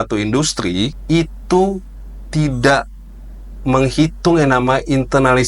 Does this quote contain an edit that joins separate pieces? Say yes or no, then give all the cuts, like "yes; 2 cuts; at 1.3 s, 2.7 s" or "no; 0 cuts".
yes; 1 cut; at 1.0 s